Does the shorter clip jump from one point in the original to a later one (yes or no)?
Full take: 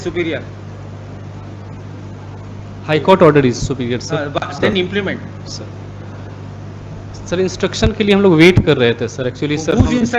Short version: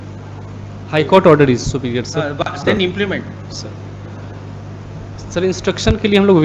no